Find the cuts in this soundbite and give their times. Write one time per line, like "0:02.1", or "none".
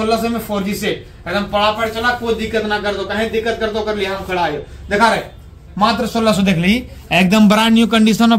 none